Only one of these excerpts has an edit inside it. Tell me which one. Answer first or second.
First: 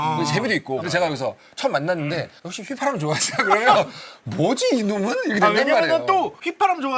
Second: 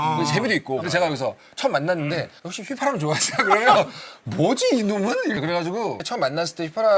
second